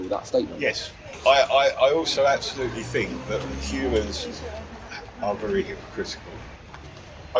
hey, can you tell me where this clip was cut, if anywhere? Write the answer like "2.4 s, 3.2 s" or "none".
1.1 s, 6.5 s